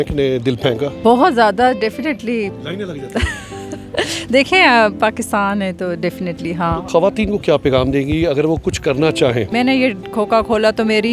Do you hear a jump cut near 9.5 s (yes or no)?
yes